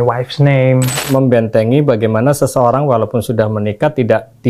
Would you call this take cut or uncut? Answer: cut